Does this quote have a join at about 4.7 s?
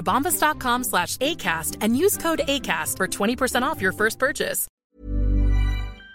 yes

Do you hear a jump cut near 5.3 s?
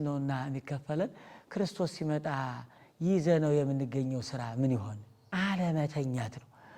yes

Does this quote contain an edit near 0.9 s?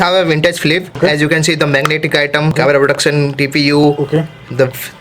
yes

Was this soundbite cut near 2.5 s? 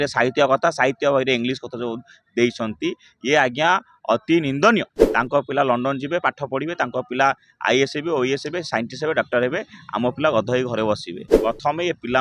no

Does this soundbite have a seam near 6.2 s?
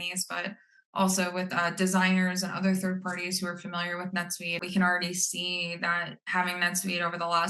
no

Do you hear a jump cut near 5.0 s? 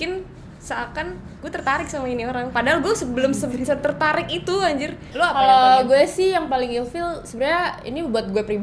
yes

